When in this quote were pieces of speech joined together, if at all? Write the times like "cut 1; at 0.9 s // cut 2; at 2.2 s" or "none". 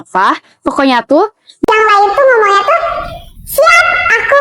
none